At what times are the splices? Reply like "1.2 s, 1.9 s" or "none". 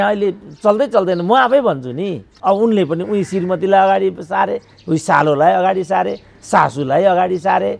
2.3 s